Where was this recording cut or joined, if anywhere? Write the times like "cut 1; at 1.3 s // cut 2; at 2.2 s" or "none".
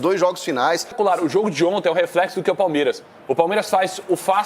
cut 1; at 0.9 s